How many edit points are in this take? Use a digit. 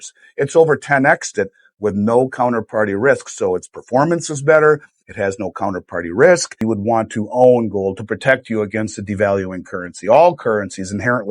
1